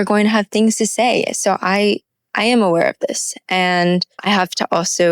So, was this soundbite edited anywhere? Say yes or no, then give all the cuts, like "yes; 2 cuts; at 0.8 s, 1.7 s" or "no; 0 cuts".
yes; 1 cut; at 4.1 s